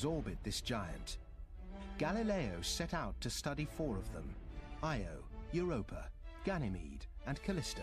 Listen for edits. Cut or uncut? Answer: uncut